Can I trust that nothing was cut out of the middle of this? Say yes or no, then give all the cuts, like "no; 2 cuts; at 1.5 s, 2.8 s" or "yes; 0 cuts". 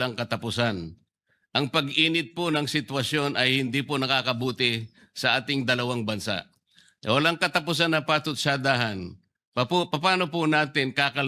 yes; 0 cuts